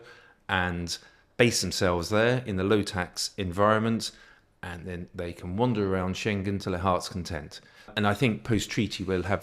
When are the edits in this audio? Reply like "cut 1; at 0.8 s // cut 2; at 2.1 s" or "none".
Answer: cut 1; at 7.9 s